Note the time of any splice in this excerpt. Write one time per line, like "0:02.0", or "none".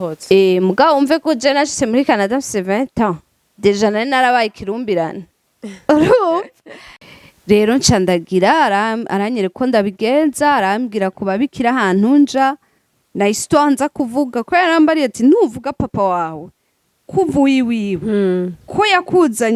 0:07.1

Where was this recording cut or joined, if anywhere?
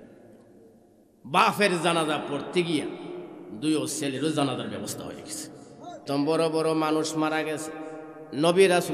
0:06.0

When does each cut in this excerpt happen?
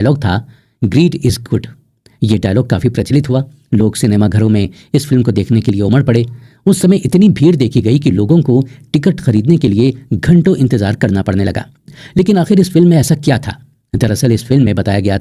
none

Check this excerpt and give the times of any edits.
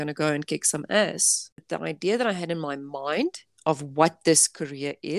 0:01.5

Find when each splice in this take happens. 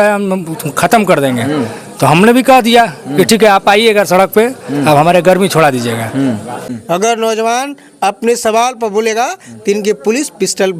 0:06.5

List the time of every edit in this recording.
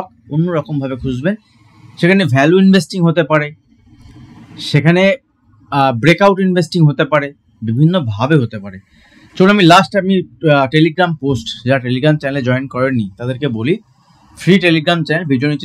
none

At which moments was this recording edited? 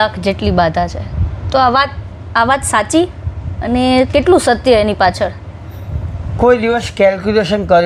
none

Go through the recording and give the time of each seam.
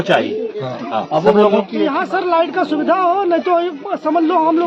0:01.7

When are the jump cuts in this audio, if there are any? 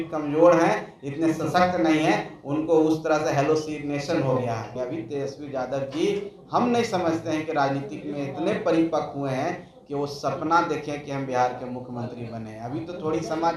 0:04.7

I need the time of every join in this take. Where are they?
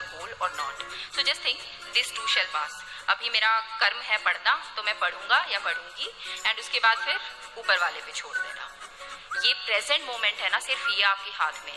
0:08.9

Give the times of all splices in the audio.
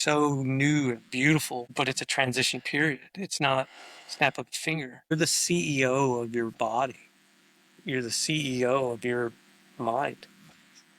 0:01.7
0:05.1

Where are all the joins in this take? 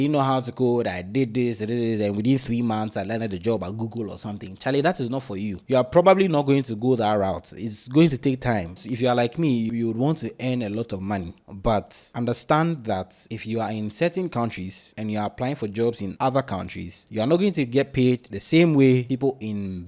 0:08.8
0:09.7
0:12.0

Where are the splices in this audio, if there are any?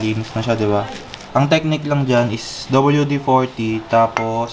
none

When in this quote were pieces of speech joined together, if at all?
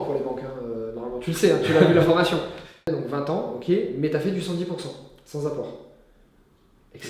0:02.9

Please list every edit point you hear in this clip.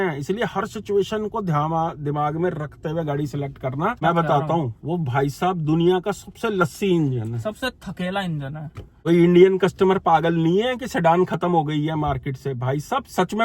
0:04.0
0:09.0

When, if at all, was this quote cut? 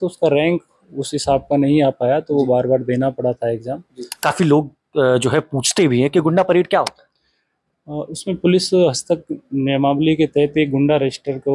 0:04.1

